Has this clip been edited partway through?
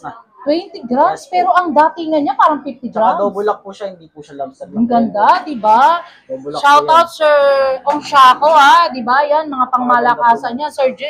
no; 0 cuts

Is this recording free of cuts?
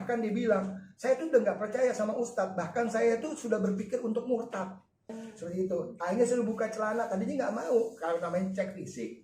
no; 1 cut; at 5.2 s

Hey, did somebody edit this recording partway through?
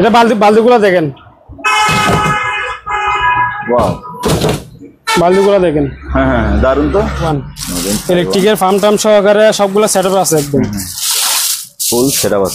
yes; 1 cut; at 7.3 s

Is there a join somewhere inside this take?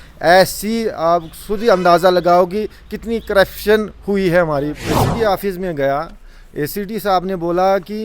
yes; 1 cut; at 5.0 s

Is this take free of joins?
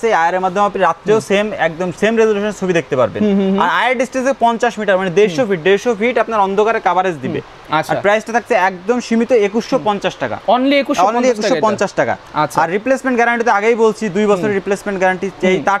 yes; 0 cuts

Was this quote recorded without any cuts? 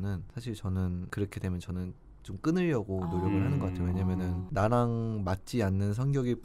yes; 0 cuts

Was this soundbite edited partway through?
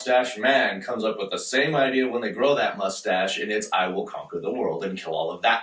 no; 0 cuts

